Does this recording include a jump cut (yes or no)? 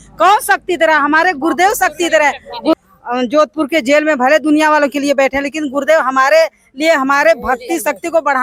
no